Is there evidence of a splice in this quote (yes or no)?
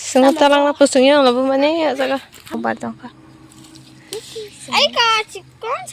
yes